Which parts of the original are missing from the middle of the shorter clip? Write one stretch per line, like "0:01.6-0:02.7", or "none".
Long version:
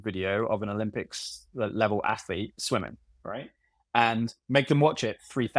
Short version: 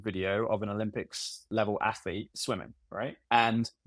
0:01.5-0:01.7
0:03.2-0:03.6